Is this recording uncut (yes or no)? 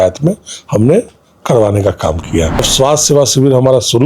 no